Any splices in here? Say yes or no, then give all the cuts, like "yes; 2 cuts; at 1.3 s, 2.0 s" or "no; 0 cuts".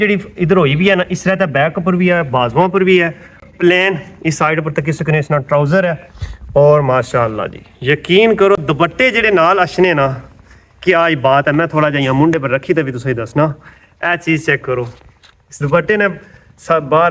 no; 0 cuts